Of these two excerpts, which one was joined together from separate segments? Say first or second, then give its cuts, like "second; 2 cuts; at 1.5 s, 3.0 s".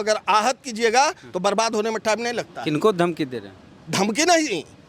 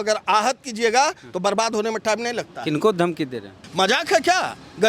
second; 1 cut; at 3.6 s